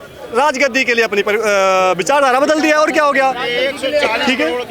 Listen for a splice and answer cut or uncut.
uncut